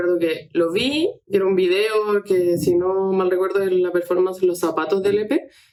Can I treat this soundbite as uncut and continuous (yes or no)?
yes